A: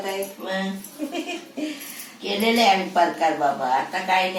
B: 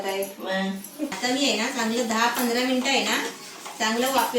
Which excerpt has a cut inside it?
B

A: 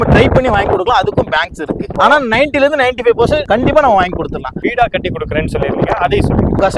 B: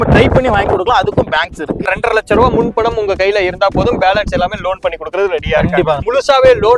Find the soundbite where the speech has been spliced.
B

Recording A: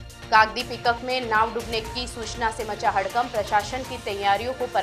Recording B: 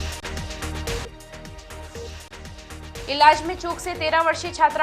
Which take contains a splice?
B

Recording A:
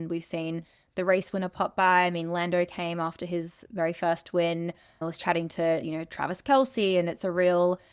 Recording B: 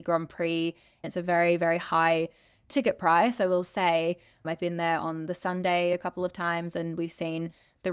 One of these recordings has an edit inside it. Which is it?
B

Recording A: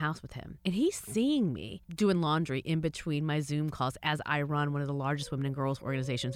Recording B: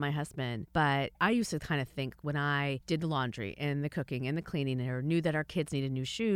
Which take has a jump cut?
B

